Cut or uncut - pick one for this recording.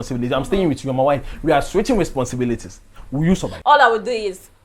cut